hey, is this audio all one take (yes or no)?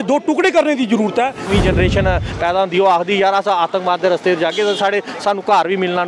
no